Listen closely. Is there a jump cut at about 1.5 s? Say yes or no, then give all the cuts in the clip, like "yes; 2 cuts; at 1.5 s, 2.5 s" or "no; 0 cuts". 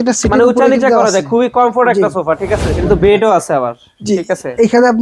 no; 1 cut; at 2.8 s